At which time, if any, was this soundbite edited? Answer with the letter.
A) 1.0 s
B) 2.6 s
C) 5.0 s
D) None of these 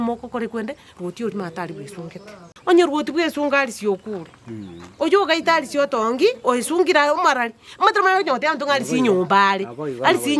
B